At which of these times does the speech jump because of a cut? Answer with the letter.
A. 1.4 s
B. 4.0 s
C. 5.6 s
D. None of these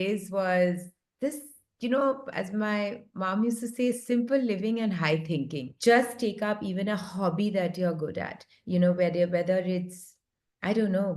C